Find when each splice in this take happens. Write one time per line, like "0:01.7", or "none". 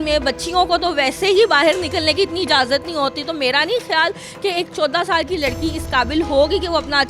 none